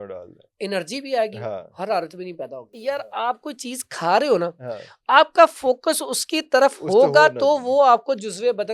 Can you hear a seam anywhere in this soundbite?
yes; 1 cut; at 2.7 s

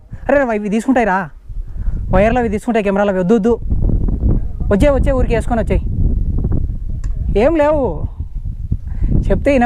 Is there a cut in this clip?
no; 0 cuts

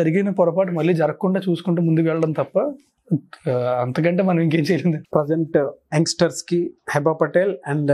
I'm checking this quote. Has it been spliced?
yes; 1 cut; at 5.0 s

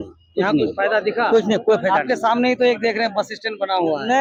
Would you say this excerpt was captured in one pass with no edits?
yes; 0 cuts

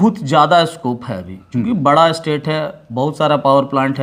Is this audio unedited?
yes; 0 cuts

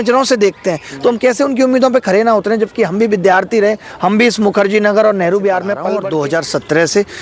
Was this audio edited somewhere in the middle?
yes; 1 cut; at 5.9 s

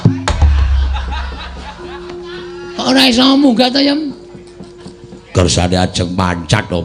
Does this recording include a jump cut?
no; 0 cuts

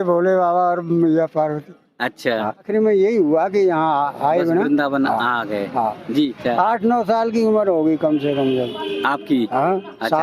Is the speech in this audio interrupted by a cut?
yes; 2 cuts; at 2.7 s, 6.4 s

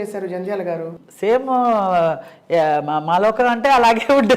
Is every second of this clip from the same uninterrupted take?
no; 1 cut; at 0.9 s

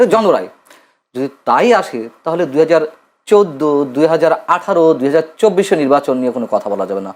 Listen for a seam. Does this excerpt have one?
no; 0 cuts

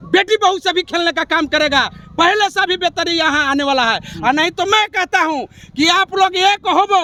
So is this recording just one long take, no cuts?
yes; 0 cuts

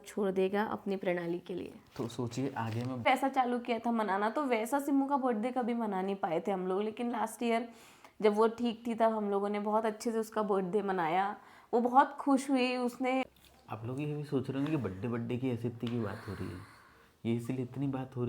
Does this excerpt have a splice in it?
yes; 2 cuts; at 3.0 s, 13.3 s

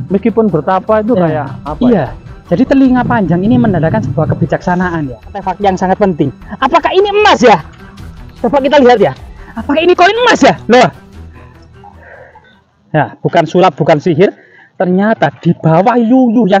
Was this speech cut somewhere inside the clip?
yes; 1 cut; at 5.5 s

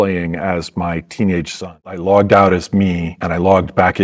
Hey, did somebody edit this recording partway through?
yes; 1 cut; at 1.7 s

